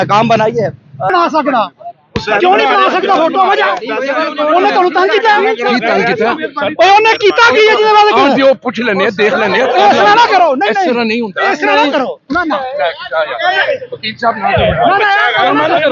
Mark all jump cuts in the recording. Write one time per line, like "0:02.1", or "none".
0:01.1